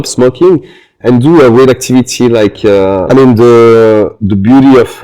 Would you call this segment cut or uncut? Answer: cut